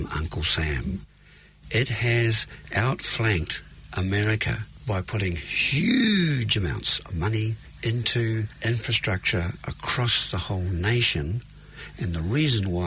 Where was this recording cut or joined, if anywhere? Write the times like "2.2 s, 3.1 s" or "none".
2.7 s, 4.7 s, 7.6 s, 8.5 s